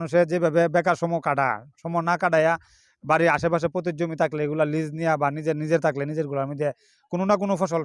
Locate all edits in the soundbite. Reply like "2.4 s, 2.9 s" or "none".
none